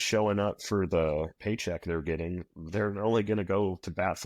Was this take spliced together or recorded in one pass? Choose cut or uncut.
cut